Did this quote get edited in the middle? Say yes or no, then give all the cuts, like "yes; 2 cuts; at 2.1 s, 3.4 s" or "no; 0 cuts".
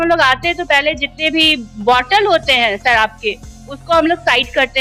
no; 0 cuts